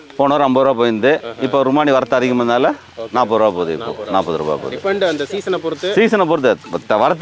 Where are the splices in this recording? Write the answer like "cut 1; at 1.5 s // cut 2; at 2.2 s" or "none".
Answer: none